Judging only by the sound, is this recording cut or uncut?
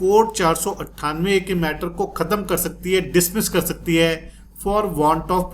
uncut